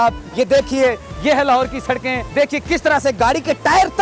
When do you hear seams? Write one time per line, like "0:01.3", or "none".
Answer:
0:02.2